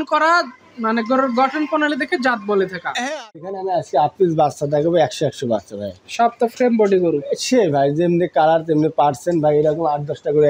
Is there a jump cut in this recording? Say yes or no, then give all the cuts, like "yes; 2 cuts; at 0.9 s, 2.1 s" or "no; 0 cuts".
yes; 1 cut; at 3.4 s